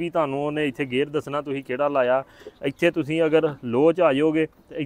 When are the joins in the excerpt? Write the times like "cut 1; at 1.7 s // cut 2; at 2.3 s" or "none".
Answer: none